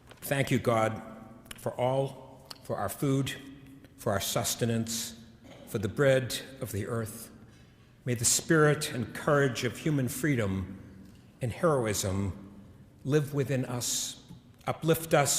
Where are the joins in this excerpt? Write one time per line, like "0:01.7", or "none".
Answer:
0:05.2

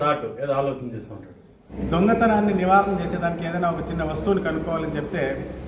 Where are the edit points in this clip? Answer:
0:01.7

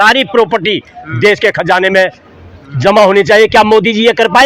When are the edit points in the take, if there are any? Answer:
none

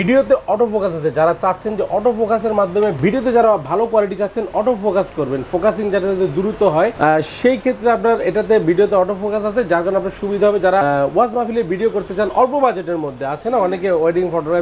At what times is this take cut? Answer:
none

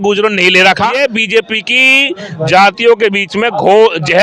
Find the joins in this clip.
0:00.9

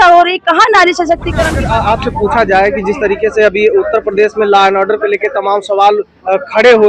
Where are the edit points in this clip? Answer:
0:01.6

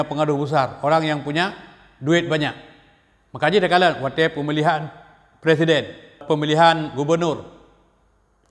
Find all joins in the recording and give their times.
0:06.2

